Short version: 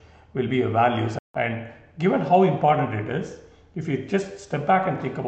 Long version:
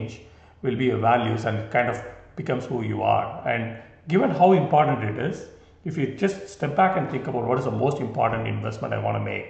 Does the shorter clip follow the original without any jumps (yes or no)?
no